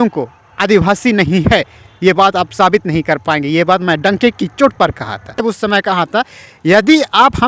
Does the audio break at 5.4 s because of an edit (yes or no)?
yes